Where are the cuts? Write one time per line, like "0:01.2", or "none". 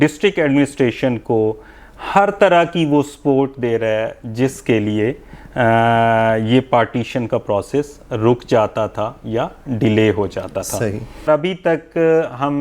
0:11.3